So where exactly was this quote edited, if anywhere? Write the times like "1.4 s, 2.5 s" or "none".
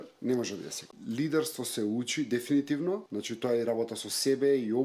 1.0 s, 3.1 s